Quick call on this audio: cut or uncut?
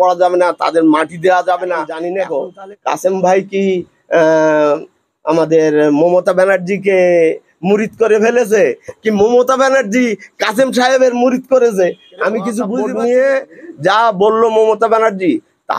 cut